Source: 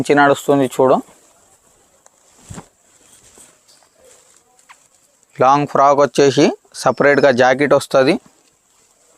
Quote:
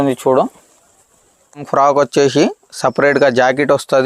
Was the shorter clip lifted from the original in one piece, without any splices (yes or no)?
no